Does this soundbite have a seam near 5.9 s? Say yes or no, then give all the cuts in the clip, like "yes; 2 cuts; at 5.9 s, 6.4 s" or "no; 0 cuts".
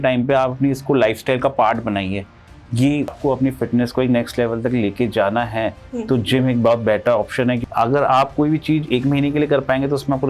no; 2 cuts; at 3.2 s, 7.6 s